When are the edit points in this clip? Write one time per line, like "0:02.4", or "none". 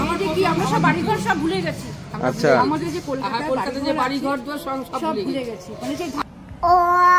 0:06.2